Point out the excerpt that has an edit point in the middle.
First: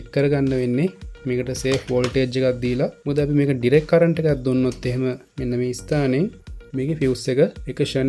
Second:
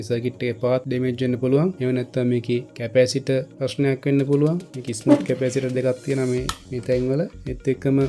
second; 4 cuts; at 0.9 s, 1.8 s, 2.8 s, 3.6 s

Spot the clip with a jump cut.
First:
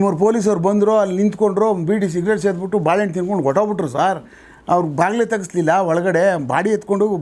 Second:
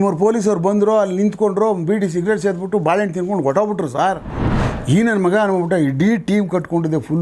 second; 1 cut; at 4.5 s

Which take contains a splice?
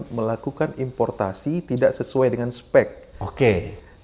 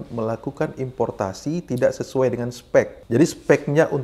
second; 1 cut; at 3.0 s

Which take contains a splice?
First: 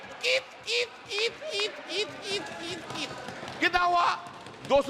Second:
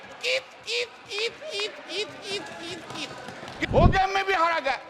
second; 1 cut; at 3.7 s

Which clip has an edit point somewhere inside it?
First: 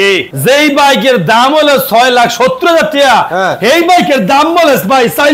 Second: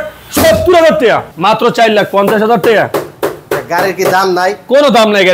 second; 1 cut; at 1.3 s

